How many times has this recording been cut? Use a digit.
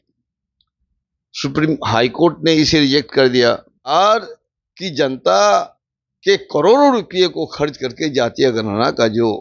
1